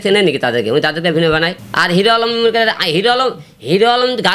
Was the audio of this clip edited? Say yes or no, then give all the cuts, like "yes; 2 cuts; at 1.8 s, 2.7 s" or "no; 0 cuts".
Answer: yes; 1 cut; at 1.6 s